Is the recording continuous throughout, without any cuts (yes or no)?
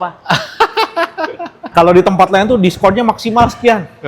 no